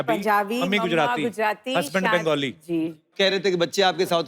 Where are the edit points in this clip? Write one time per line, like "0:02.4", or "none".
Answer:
0:03.1